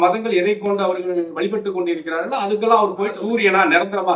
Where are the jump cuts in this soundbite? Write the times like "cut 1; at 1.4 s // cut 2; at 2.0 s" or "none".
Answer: cut 1; at 3.2 s